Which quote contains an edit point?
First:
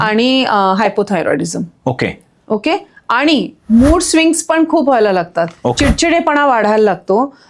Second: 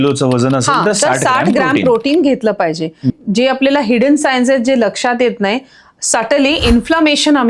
second; 1 cut; at 3.2 s

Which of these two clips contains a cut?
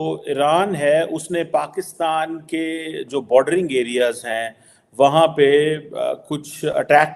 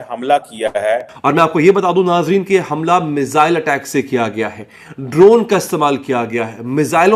second; 1 cut; at 1.1 s

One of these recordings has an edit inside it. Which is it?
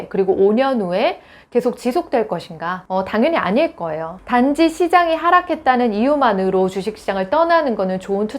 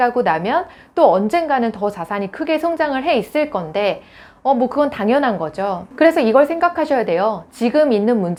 first; 1 cut; at 4.1 s

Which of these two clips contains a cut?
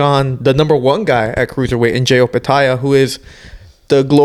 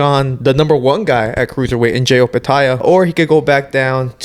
second; 1 cut; at 2.8 s

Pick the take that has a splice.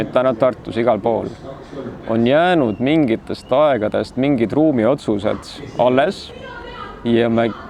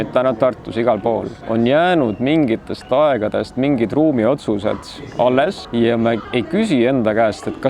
second; 3 cuts; at 1.4 s, 5.6 s, 6.4 s

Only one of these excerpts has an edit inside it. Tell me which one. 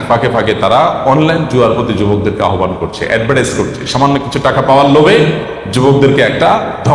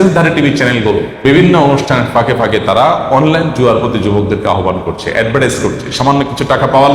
second; 1 cut; at 1.1 s

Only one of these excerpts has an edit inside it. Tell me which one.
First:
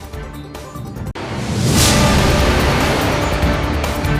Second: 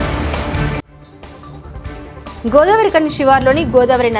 second; 1 cut; at 2.2 s

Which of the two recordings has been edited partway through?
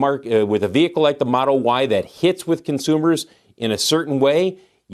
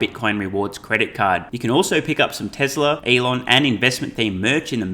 second; 1 cut; at 3.0 s

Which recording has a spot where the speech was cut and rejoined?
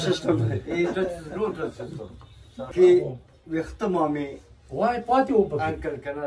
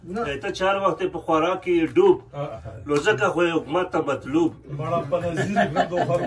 first; 1 cut; at 2.7 s

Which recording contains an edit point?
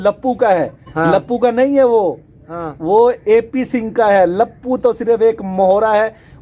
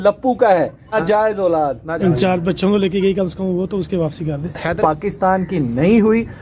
second; 3 cuts; at 0.8 s, 1.9 s, 4.8 s

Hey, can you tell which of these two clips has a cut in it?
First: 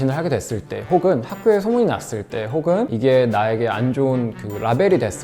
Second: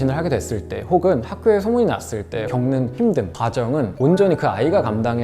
second; 2 cuts; at 2.4 s, 3.9 s

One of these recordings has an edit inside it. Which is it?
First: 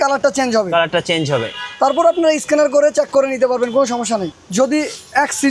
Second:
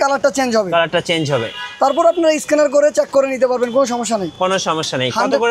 first; 1 cut; at 4.3 s

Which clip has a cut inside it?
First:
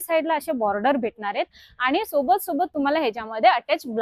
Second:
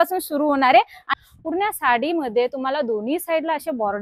second; 1 cut; at 1.0 s

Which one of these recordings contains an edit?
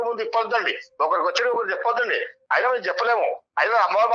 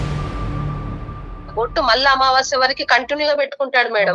second; 1 cut; at 1.5 s

